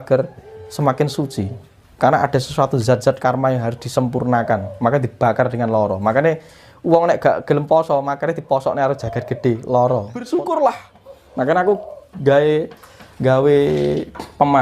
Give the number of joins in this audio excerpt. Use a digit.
1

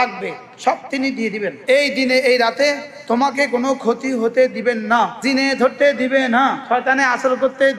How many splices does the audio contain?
3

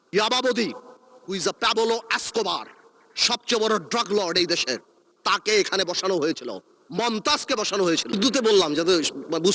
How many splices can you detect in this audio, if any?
1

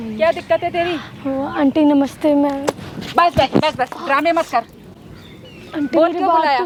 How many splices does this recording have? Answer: 0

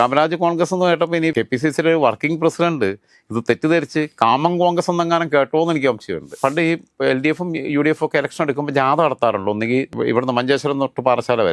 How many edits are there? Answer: 2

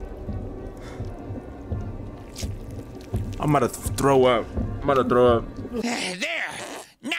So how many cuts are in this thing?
1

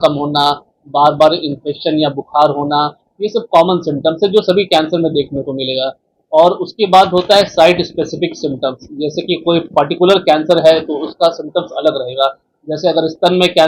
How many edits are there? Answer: 0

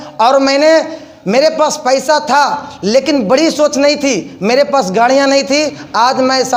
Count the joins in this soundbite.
0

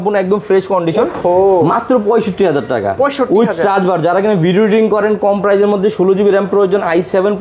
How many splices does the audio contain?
0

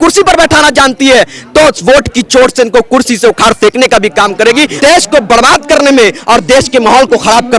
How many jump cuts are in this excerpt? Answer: 1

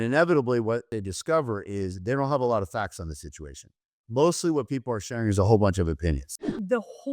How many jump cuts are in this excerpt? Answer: 2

